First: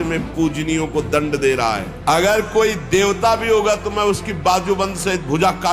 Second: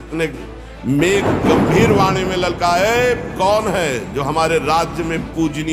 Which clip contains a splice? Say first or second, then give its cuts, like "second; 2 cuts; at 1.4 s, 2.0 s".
first; 1 cut; at 1.9 s